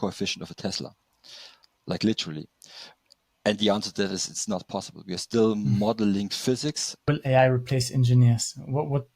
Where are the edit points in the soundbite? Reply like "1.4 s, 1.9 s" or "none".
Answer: 7.0 s